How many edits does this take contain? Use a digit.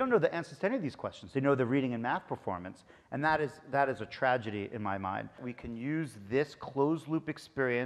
1